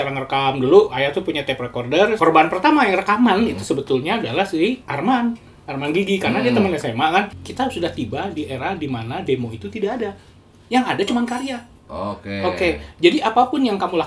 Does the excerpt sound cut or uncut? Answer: cut